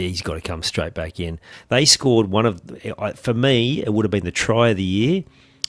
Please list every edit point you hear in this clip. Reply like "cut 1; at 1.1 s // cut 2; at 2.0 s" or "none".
cut 1; at 1.5 s